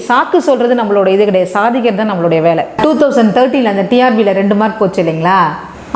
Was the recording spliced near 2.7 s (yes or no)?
yes